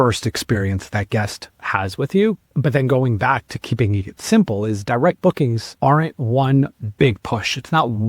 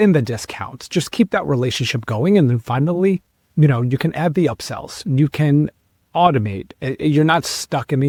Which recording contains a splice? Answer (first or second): first